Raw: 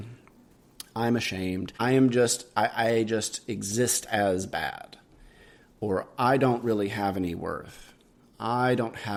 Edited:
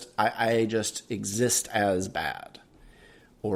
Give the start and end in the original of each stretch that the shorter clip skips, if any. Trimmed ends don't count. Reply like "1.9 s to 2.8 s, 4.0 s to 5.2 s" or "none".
none